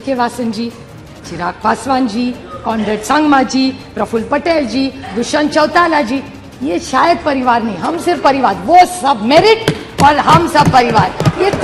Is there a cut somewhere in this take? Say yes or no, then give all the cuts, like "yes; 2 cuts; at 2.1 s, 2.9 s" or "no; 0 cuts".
no; 0 cuts